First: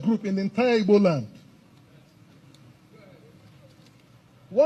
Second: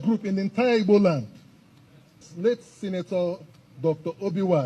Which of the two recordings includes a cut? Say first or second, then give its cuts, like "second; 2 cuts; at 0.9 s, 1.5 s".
second; 1 cut; at 2.3 s